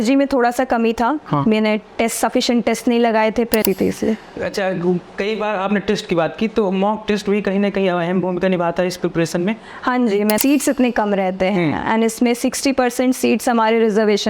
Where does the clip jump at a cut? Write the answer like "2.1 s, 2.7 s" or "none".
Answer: 3.6 s, 10.4 s